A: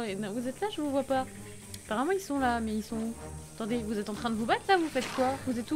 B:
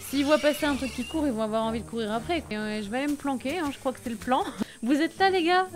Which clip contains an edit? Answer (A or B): B